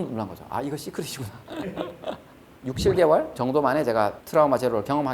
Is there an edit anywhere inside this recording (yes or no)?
yes